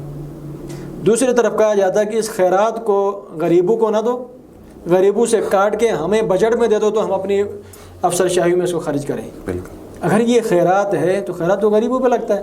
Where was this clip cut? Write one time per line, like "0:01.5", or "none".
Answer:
none